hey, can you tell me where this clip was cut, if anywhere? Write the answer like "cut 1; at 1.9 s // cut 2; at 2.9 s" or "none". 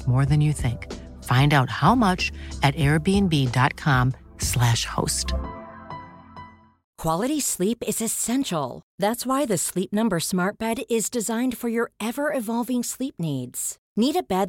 cut 1; at 6.9 s